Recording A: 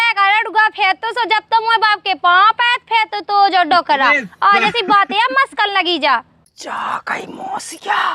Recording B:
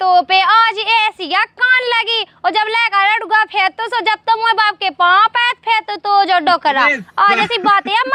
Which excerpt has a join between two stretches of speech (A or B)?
A